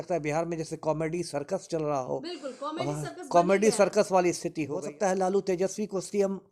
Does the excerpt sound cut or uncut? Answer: cut